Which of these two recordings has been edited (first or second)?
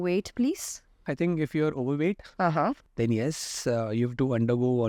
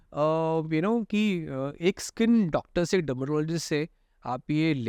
first